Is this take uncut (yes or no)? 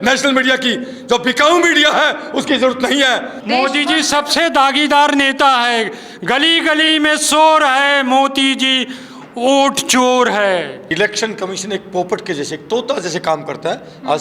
no